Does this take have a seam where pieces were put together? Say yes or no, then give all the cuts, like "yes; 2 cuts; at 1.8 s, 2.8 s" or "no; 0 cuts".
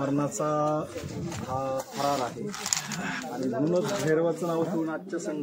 no; 0 cuts